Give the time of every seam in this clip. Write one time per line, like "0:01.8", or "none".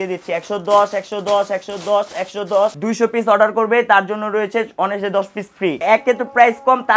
0:02.8
0:05.8